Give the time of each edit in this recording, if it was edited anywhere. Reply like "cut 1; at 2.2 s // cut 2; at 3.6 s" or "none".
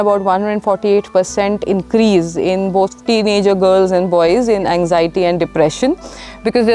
cut 1; at 3.0 s